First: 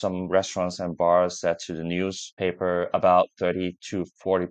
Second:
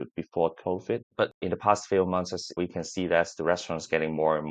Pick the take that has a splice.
second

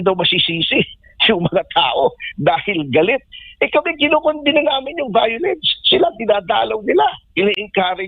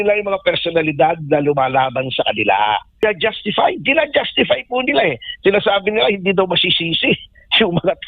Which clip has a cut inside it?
second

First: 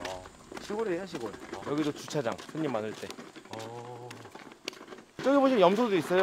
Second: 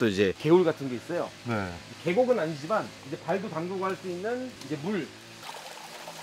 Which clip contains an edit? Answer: first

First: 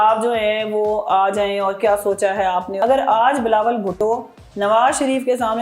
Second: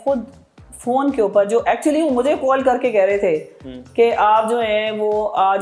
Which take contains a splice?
first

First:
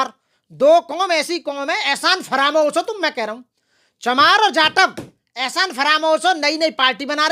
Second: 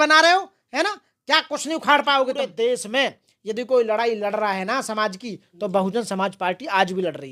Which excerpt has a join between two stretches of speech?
second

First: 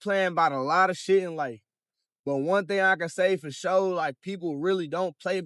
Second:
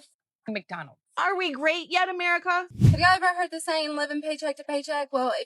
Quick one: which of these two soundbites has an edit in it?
second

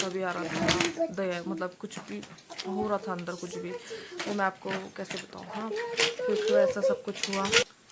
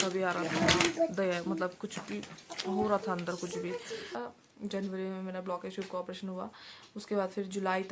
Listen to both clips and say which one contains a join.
second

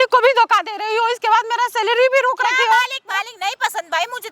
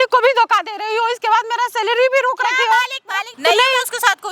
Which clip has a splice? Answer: second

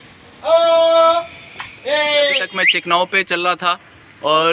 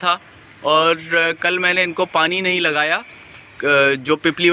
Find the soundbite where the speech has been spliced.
first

